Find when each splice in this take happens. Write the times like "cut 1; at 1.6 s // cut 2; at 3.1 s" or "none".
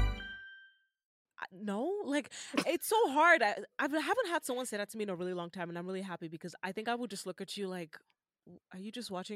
cut 1; at 1.0 s